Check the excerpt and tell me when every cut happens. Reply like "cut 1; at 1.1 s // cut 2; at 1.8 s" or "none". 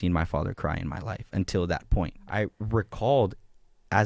cut 1; at 2.2 s